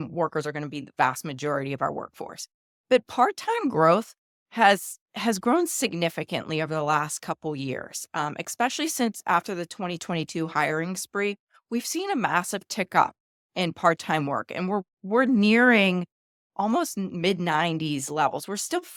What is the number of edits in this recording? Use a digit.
0